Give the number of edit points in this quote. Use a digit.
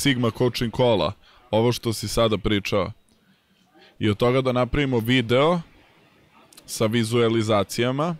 0